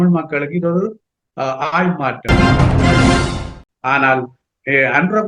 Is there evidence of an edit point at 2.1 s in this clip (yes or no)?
yes